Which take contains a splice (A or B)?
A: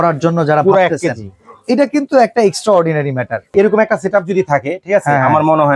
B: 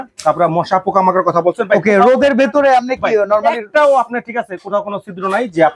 A